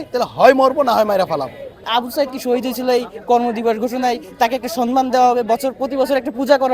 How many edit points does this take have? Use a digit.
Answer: 1